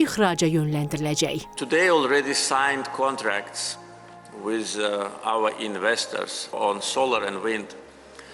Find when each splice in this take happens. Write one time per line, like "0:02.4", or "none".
0:01.5